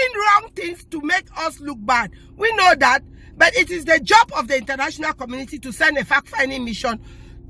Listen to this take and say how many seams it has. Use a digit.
0